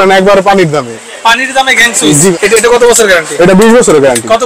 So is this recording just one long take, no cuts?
no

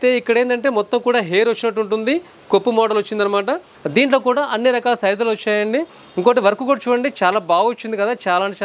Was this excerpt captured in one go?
no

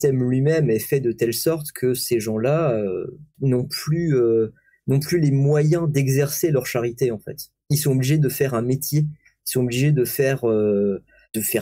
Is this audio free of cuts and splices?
yes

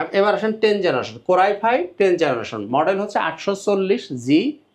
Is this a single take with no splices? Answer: yes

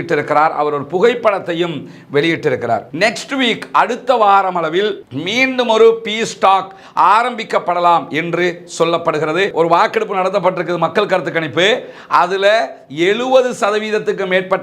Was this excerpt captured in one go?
no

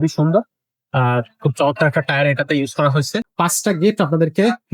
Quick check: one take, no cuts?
no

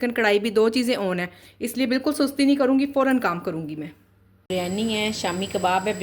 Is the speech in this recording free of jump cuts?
no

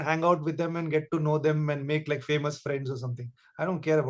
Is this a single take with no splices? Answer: yes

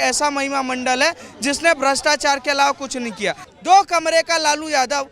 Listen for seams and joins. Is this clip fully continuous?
no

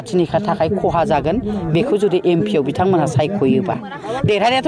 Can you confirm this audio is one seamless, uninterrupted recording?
yes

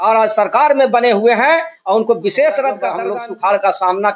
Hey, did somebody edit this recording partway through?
yes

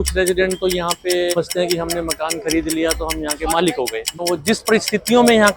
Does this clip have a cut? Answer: yes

